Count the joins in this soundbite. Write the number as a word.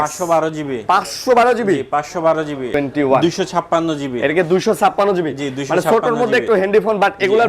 one